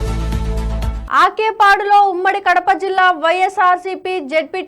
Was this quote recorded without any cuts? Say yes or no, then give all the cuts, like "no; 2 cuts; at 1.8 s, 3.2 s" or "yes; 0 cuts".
no; 1 cut; at 1.0 s